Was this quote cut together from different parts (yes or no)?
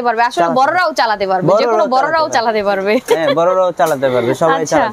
no